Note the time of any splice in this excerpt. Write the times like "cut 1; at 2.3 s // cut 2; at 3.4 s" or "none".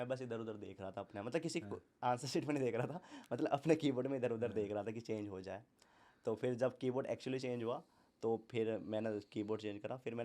none